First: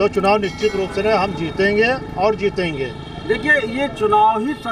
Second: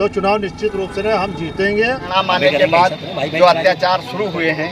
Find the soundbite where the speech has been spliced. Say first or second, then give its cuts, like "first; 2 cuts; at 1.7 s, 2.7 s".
second; 1 cut; at 2.1 s